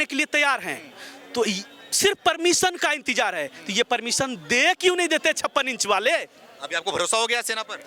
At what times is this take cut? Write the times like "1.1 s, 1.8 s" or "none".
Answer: none